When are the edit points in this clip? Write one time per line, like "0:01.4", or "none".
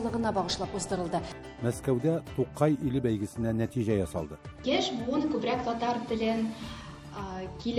0:01.3